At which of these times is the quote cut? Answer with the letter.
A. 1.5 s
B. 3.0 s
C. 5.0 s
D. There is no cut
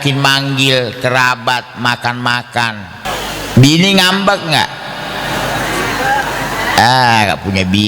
B